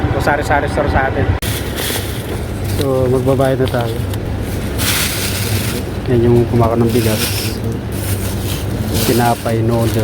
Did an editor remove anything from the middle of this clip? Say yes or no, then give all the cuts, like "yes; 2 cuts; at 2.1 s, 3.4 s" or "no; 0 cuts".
yes; 2 cuts; at 1.4 s, 4.2 s